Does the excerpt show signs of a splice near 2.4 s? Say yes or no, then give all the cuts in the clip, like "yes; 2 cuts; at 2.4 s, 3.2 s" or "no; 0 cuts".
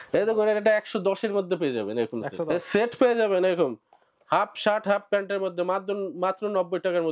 yes; 1 cut; at 2.4 s